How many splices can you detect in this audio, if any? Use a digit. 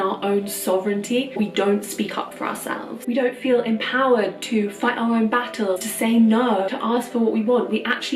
4